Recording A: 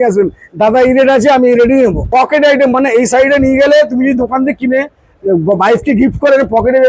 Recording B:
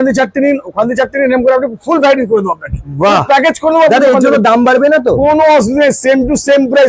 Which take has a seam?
A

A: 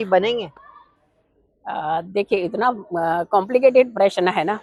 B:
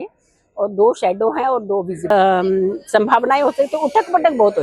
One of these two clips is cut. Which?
B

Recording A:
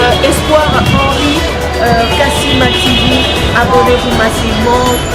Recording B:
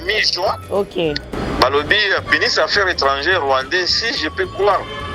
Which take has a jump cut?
B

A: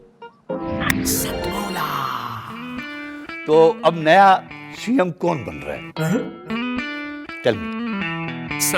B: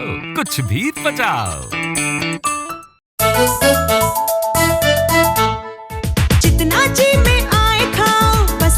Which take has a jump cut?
B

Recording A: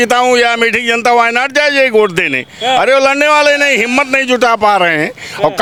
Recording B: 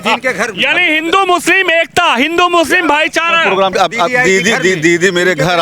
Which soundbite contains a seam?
B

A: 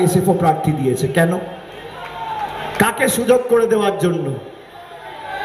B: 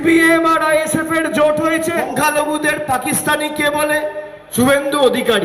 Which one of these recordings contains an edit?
B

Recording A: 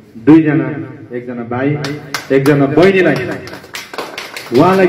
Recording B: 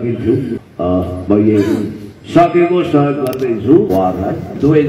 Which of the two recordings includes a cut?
B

